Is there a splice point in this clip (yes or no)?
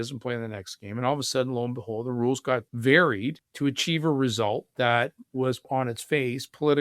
yes